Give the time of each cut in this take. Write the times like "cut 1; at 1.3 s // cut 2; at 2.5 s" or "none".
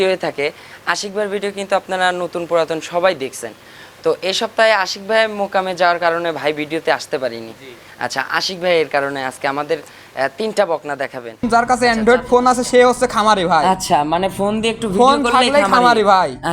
cut 1; at 11.4 s